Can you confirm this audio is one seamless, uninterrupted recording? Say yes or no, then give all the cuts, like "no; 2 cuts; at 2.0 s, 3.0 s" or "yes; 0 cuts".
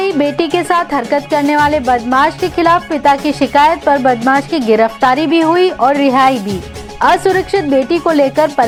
yes; 0 cuts